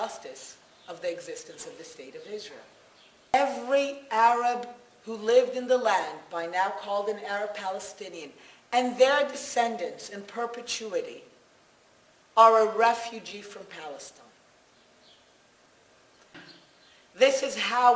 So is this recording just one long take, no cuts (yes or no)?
no